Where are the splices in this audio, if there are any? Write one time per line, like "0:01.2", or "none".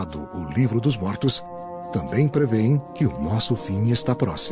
none